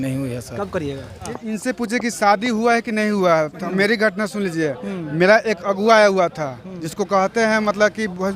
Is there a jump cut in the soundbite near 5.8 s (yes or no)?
no